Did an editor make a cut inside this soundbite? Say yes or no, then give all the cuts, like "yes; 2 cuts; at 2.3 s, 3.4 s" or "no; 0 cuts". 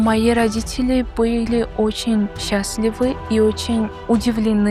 no; 0 cuts